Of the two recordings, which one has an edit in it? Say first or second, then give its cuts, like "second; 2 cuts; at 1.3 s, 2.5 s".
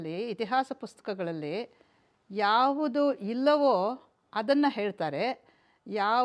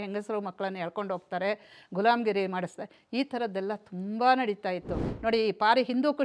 second; 1 cut; at 5.0 s